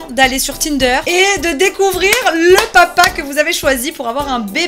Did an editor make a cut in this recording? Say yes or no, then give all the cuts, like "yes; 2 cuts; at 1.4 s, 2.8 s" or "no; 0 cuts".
yes; 1 cut; at 1.0 s